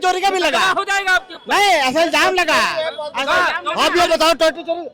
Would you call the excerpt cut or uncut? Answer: uncut